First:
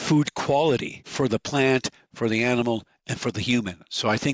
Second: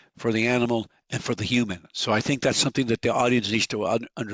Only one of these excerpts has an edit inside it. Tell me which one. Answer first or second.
first